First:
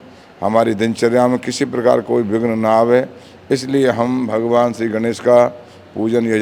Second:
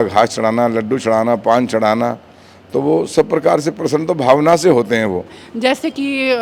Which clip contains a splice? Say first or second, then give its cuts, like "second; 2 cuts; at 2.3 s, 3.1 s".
second; 1 cut; at 5.4 s